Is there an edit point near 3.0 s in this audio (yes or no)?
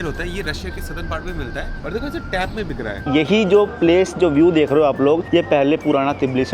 yes